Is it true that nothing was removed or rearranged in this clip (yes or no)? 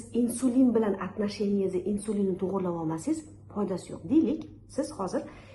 yes